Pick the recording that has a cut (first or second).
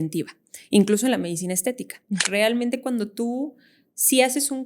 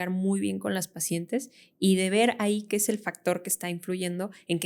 first